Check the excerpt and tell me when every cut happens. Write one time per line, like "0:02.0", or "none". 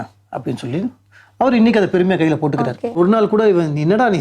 0:03.0